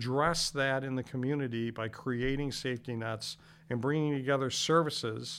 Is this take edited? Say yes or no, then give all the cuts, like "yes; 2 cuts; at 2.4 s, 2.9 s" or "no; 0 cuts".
no; 0 cuts